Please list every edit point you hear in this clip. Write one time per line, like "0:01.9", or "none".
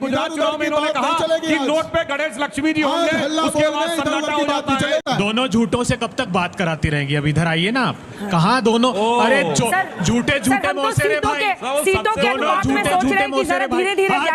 0:05.0